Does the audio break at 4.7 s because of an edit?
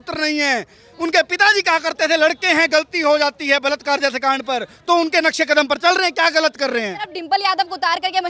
no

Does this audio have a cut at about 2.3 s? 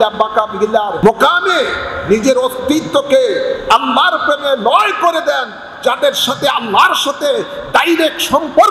no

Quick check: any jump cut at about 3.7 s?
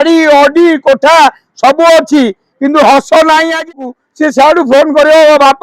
yes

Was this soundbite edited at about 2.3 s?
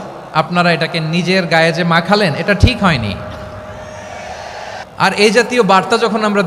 no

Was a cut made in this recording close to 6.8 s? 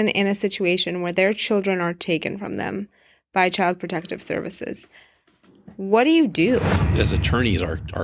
yes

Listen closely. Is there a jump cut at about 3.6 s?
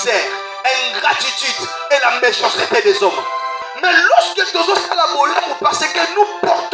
yes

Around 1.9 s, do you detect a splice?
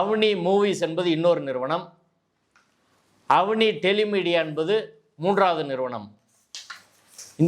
no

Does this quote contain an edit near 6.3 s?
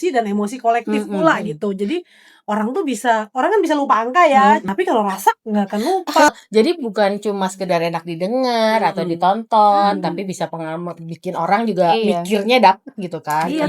yes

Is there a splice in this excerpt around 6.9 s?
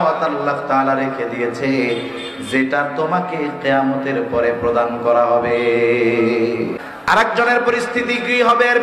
yes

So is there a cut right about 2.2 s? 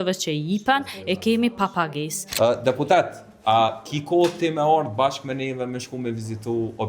yes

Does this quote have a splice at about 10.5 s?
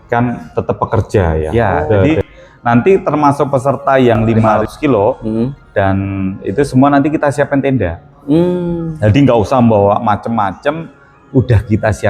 no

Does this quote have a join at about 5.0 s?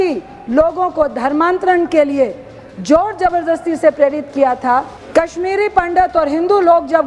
yes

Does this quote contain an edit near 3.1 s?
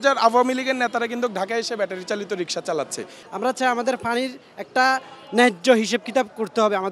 yes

